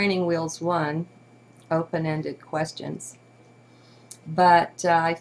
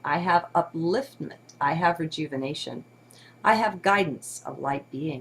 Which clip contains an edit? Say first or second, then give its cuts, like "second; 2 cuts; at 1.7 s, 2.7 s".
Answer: first; 1 cut; at 3.1 s